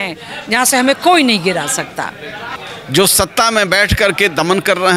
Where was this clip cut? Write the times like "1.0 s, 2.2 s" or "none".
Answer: 2.5 s